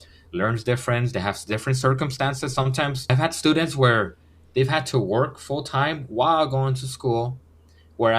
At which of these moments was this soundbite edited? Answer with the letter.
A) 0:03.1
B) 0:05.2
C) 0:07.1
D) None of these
A